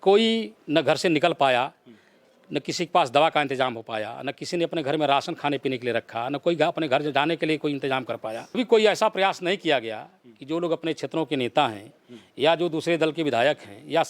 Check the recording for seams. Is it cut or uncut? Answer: cut